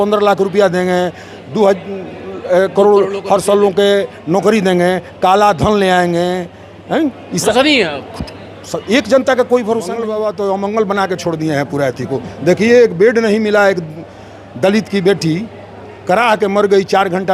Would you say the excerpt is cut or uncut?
cut